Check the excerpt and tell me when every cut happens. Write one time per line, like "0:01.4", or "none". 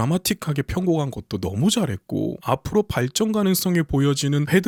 none